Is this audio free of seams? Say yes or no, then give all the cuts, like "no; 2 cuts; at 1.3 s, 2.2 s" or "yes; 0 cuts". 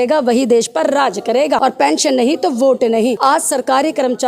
no; 2 cuts; at 1.6 s, 3.2 s